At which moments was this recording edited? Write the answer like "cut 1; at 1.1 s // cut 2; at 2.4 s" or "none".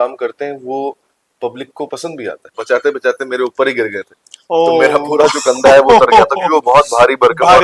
cut 1; at 2.6 s